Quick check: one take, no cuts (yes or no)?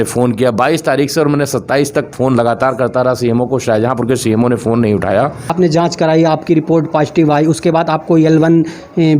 no